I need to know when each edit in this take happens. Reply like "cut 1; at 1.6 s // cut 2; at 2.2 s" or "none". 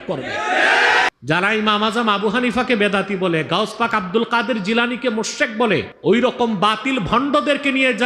cut 1; at 1.1 s // cut 2; at 5.9 s